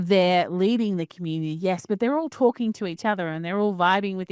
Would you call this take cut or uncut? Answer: uncut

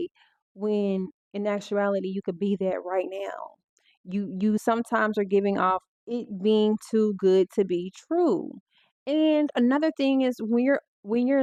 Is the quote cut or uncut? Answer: uncut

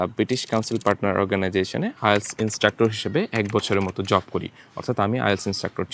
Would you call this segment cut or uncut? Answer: uncut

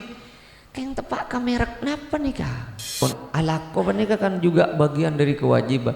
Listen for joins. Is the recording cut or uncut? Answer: cut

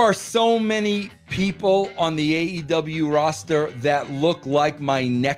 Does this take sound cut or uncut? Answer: uncut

